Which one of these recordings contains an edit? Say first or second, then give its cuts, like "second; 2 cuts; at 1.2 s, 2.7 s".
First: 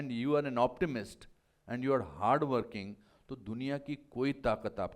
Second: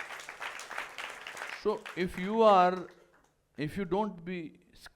second; 1 cut; at 1.5 s